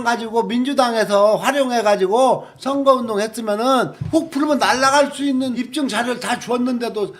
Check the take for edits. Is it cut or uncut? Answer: cut